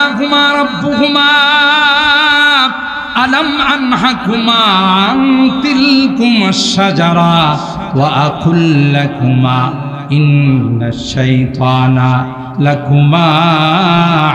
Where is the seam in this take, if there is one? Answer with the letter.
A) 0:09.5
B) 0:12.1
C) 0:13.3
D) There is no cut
D